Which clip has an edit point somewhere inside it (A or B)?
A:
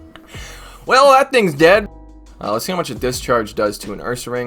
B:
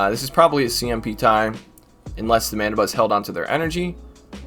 A